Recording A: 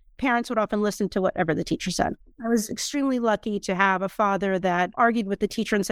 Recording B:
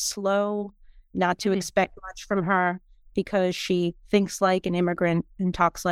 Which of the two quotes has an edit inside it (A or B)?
A